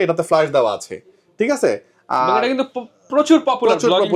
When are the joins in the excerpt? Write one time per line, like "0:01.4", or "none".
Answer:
none